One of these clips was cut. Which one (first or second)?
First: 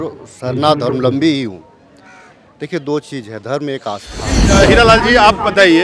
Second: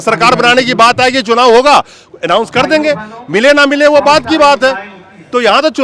first